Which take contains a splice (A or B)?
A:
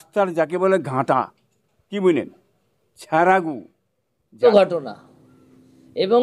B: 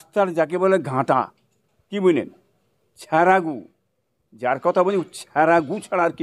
A